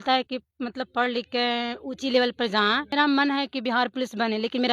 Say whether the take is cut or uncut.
cut